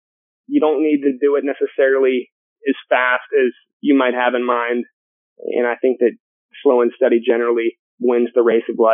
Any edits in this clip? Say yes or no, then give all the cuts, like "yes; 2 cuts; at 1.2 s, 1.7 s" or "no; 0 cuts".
yes; 1 cut; at 7.9 s